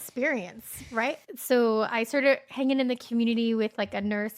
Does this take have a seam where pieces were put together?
yes; 1 cut; at 1.2 s

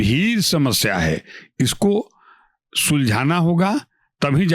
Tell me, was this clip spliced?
no; 0 cuts

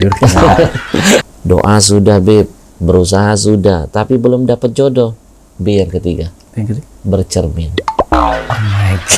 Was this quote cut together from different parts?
yes; 1 cut; at 1.2 s

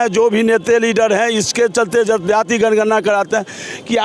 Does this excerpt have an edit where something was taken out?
no; 0 cuts

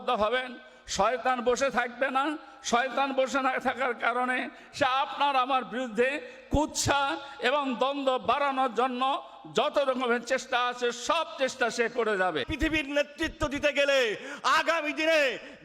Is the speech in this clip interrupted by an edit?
yes; 1 cut; at 12.5 s

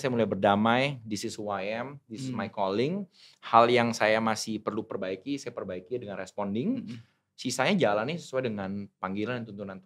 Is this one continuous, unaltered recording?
yes; 0 cuts

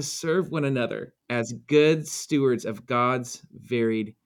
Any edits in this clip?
yes; 1 cut; at 1.1 s

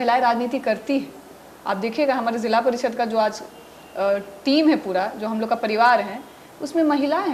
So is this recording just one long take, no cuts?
yes; 0 cuts

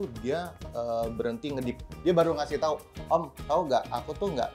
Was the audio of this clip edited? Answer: yes; 1 cut; at 1.9 s

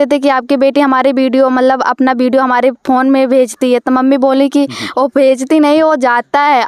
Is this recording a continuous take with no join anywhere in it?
yes; 0 cuts

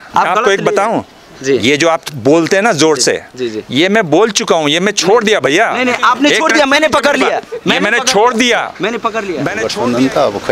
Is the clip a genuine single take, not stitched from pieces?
no; 1 cut; at 9.3 s

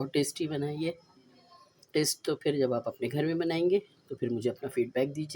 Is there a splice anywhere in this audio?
yes; 1 cut; at 3.4 s

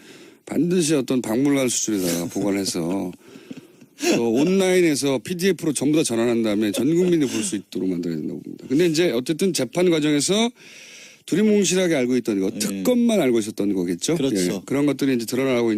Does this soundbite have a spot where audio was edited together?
no; 0 cuts

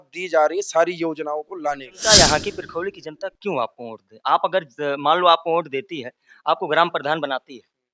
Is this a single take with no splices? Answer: no; 1 cut; at 1.9 s

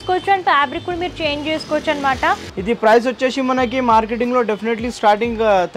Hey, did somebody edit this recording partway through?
yes; 1 cut; at 2.5 s

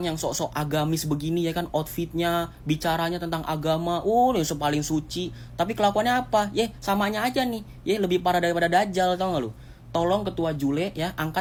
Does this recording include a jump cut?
no; 0 cuts

